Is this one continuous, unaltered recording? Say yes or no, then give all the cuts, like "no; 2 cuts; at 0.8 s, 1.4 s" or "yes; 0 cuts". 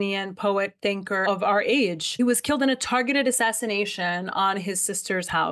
no; 1 cut; at 1.2 s